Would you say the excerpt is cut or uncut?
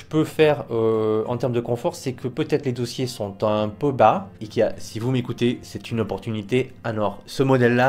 cut